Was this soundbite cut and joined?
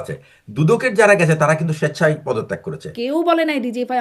yes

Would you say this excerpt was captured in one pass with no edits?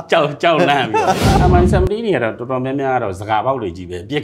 no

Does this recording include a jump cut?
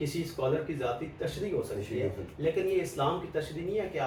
no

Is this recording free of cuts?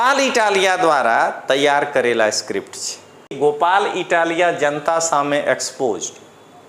no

